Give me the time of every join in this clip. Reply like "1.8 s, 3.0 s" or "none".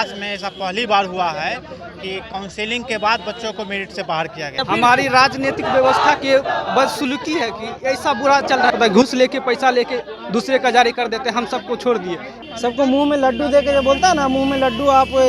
4.6 s, 8.7 s, 12.3 s